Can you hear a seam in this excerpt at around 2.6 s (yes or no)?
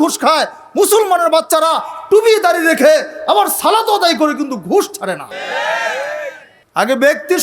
no